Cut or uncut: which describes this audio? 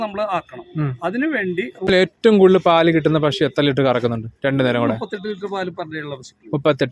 cut